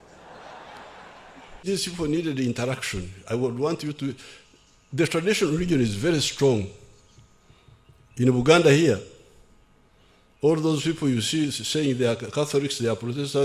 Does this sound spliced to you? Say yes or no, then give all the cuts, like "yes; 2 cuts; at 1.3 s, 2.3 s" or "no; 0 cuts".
yes; 1 cut; at 1.6 s